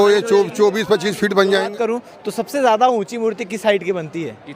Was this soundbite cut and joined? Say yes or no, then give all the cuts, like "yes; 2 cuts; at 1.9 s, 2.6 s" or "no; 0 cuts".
yes; 1 cut; at 1.7 s